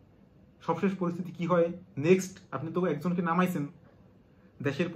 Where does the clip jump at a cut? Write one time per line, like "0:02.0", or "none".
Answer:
none